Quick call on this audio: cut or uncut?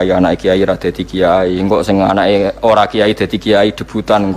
uncut